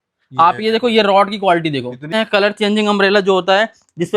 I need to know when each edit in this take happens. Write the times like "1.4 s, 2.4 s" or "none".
2.1 s